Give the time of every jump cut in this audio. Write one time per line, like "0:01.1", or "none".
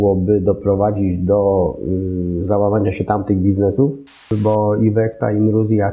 0:04.3